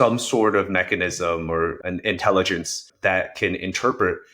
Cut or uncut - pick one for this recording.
cut